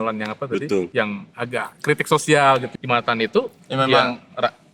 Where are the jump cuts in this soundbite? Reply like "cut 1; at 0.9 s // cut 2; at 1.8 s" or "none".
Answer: cut 1; at 0.9 s // cut 2; at 2.7 s